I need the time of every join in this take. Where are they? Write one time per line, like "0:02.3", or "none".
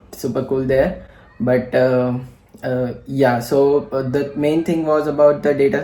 none